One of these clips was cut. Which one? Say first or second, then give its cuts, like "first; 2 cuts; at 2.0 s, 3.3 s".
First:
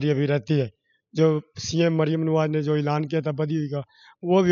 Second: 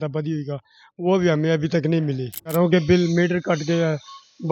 second; 1 cut; at 2.5 s